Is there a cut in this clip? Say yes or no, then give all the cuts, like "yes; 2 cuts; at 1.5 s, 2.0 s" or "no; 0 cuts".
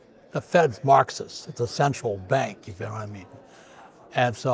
no; 0 cuts